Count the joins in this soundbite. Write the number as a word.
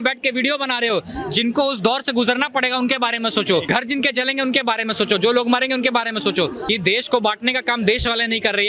two